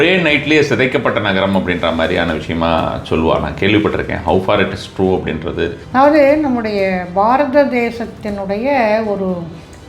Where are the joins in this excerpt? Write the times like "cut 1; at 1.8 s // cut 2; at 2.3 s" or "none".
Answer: cut 1; at 5.8 s